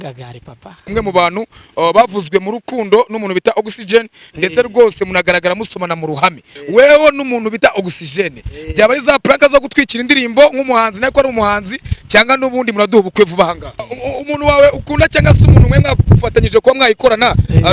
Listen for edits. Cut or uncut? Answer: cut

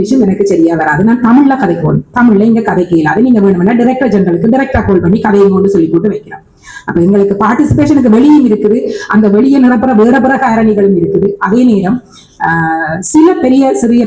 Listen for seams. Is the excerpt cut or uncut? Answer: uncut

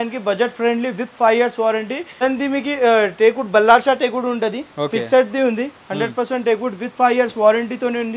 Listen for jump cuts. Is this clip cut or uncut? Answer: cut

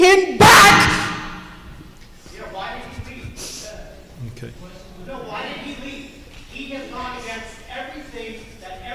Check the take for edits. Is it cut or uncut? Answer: uncut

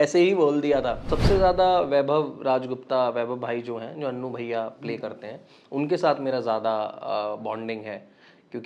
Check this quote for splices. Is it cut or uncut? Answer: cut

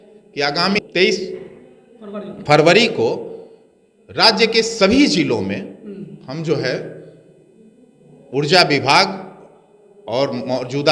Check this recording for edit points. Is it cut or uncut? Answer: uncut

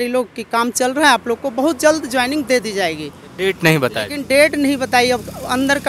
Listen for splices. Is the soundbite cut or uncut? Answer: uncut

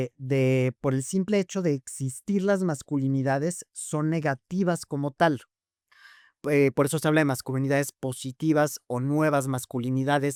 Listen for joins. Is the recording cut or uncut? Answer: uncut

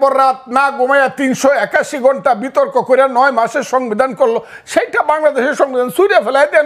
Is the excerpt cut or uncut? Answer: uncut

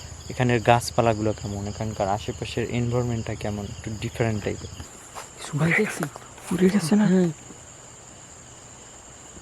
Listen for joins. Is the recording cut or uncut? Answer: cut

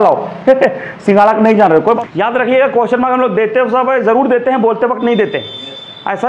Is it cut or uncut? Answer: cut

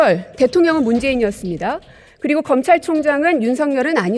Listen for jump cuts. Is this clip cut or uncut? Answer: uncut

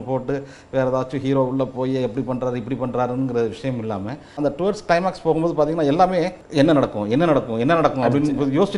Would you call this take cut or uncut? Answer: cut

